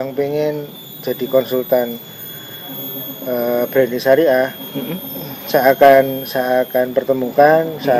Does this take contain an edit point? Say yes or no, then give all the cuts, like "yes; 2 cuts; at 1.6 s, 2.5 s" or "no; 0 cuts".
no; 0 cuts